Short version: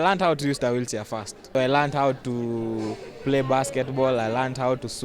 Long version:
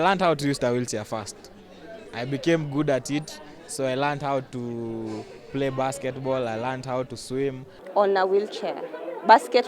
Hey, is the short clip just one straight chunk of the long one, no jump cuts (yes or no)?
no